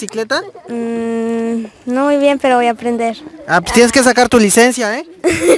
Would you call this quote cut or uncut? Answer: uncut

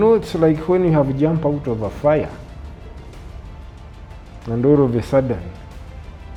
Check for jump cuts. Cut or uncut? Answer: uncut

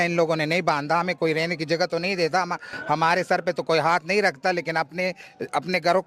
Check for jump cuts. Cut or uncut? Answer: uncut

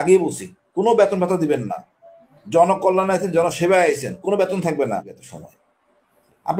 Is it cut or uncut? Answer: cut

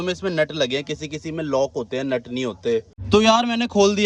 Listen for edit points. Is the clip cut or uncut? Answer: cut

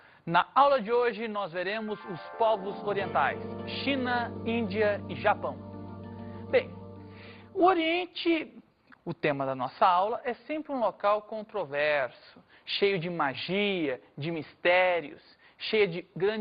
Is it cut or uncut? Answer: cut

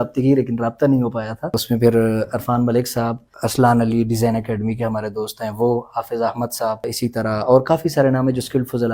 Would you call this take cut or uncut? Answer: cut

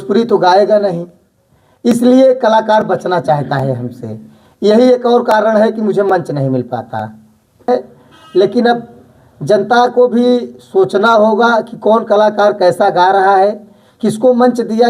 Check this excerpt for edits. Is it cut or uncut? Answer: cut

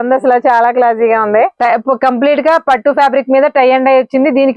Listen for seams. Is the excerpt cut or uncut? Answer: cut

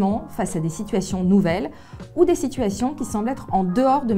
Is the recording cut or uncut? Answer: uncut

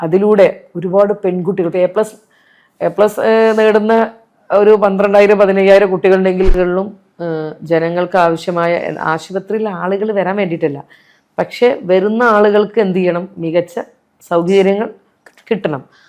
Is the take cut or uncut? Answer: cut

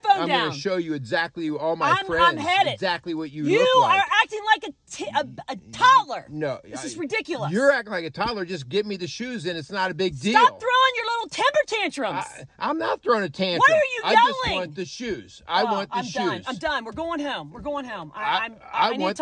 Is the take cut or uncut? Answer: uncut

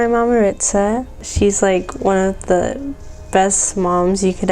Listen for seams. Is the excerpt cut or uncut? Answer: uncut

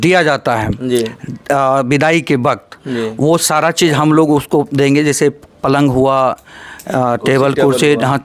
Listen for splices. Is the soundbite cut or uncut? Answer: uncut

